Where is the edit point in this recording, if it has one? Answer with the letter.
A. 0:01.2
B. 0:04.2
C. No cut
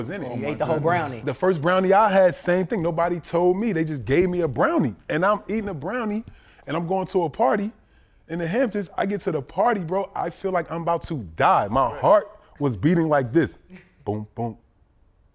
A